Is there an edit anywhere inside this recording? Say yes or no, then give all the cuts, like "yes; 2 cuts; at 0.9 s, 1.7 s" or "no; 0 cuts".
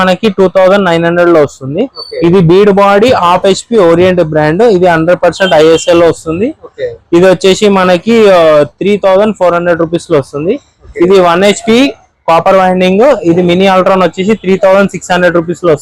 no; 0 cuts